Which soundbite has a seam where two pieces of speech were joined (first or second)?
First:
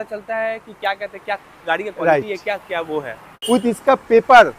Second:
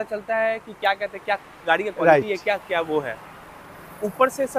first